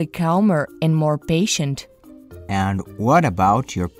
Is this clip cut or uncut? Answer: cut